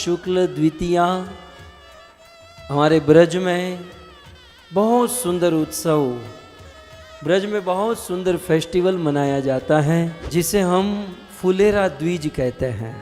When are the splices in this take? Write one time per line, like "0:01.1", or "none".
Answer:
0:10.2